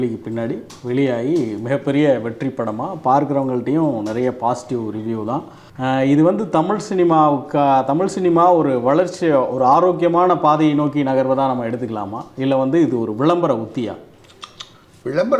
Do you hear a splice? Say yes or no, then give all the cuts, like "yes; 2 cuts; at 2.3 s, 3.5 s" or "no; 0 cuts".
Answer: yes; 1 cut; at 5.6 s